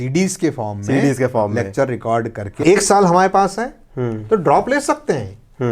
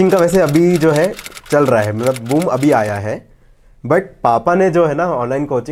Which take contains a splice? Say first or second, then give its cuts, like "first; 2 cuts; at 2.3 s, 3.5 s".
first; 1 cut; at 2.6 s